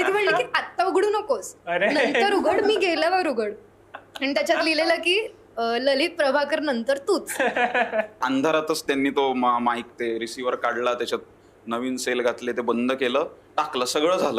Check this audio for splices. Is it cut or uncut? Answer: cut